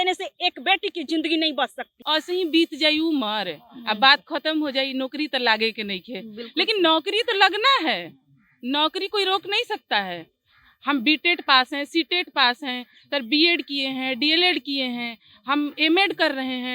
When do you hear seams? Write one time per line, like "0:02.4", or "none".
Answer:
0:02.0